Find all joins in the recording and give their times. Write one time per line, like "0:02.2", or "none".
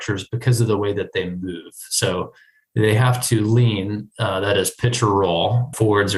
none